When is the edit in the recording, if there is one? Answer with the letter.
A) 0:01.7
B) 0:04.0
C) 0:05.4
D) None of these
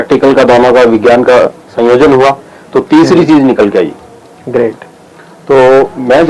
D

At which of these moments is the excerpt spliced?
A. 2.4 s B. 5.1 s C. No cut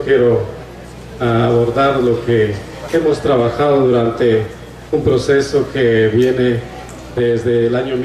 C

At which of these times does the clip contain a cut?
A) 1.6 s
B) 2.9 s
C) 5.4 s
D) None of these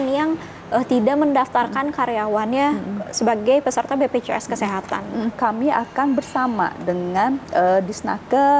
C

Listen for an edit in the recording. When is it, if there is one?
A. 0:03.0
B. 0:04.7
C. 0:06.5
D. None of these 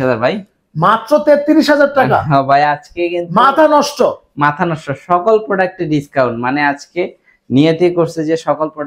D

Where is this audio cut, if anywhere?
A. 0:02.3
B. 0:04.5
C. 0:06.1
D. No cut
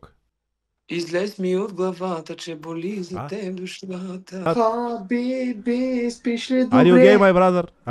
B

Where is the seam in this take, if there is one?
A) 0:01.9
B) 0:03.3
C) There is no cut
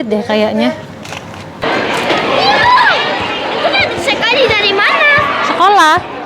A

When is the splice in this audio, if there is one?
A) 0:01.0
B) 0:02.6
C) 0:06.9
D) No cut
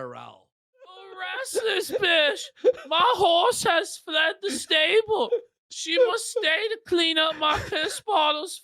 A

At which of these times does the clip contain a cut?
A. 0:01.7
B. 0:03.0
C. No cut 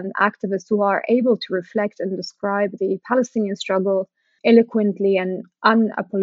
C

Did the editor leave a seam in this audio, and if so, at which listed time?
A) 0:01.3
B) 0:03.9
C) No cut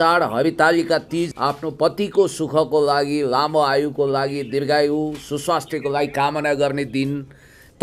A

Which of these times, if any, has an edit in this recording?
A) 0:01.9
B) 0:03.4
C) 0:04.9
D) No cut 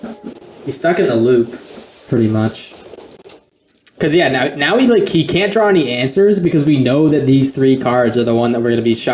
B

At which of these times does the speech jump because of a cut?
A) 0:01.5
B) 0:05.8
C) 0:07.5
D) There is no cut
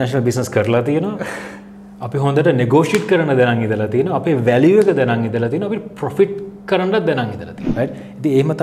C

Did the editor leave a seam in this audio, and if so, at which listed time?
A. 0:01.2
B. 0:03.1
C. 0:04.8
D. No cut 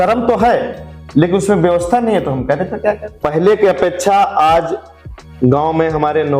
B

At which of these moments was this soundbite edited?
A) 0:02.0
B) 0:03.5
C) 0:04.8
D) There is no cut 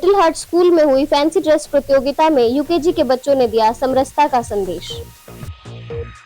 C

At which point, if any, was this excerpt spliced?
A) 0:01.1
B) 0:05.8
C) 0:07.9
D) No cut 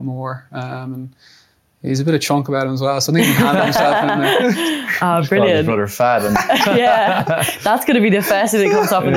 D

